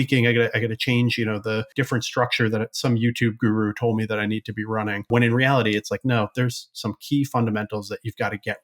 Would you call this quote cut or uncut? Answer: cut